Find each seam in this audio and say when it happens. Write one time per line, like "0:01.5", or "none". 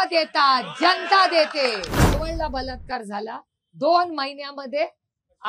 0:02.2